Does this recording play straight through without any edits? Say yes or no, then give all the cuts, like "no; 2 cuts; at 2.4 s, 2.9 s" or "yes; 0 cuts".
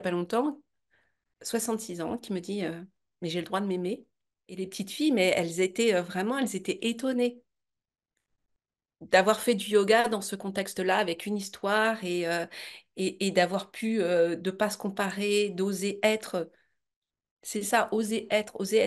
no; 1 cut; at 4.5 s